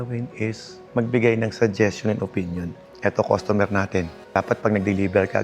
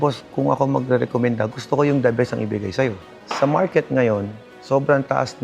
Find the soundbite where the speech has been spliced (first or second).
first